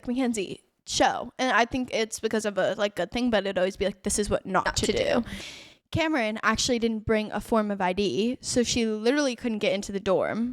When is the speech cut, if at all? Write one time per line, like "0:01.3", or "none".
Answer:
0:05.4